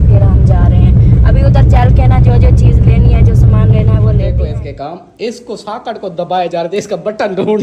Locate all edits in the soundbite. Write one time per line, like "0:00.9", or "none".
0:04.4